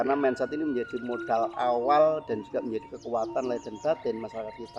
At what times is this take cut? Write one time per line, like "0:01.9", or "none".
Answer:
none